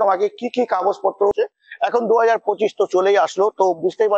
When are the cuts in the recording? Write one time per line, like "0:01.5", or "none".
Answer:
0:01.3